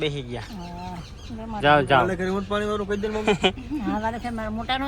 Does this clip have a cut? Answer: no; 0 cuts

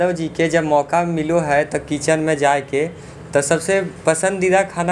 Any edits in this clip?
no; 0 cuts

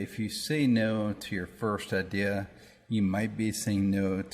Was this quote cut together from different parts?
no; 0 cuts

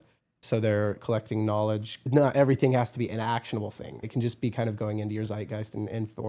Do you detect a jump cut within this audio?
yes; 3 cuts; at 1.0 s, 2.1 s, 4.0 s

